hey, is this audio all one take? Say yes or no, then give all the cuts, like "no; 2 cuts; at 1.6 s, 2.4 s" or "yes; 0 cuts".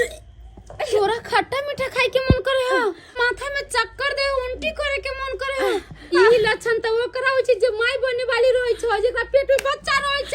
no; 2 cuts; at 3.2 s, 6.1 s